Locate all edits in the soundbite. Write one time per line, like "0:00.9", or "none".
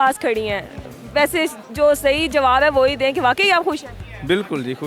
none